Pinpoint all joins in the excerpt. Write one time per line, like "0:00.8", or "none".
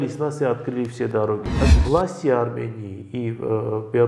0:01.6